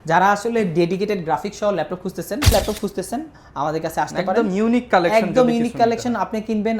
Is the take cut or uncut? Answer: cut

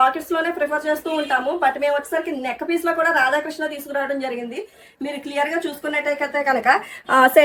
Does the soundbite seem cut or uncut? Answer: uncut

